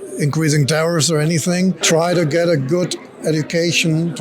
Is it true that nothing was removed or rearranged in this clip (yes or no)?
no